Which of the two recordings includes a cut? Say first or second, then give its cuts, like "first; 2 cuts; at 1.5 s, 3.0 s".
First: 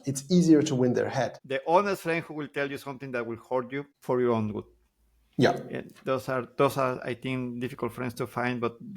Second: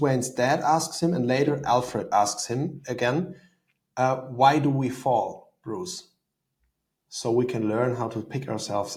first; 2 cuts; at 1.4 s, 3.9 s